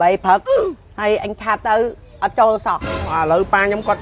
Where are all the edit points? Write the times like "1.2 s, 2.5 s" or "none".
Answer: 3.0 s